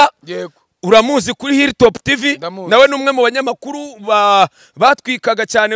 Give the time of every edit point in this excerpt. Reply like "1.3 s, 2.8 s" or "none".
none